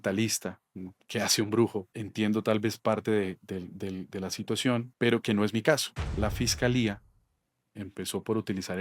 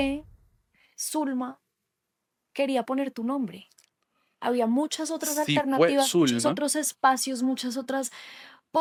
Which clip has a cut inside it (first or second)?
first